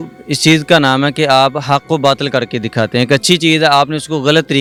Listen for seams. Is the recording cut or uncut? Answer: uncut